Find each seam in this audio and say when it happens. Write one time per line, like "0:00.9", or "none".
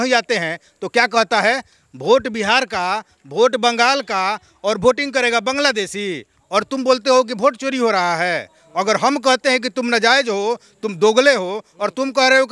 none